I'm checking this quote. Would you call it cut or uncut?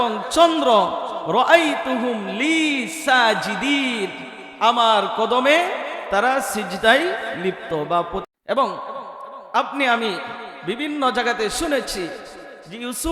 cut